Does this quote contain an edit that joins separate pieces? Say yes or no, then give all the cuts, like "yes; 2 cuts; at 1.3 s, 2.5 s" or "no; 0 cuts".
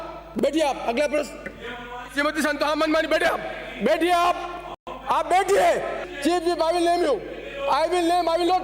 yes; 1 cut; at 6.0 s